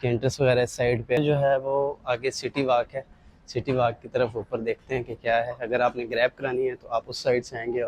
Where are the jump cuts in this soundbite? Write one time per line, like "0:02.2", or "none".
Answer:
0:01.2